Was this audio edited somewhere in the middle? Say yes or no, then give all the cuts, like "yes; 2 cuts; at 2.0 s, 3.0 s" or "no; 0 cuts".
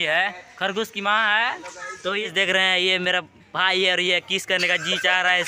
yes; 1 cut; at 1.9 s